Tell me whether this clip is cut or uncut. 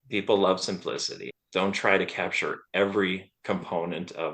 uncut